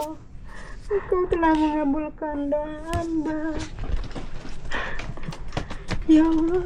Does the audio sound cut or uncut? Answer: uncut